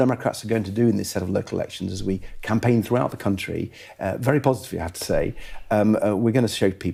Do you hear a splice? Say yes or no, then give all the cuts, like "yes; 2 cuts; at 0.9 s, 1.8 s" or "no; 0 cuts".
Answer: no; 0 cuts